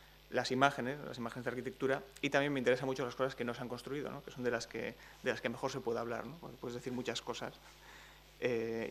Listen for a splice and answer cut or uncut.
cut